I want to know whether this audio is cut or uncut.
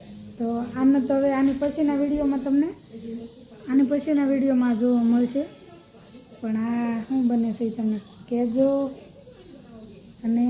uncut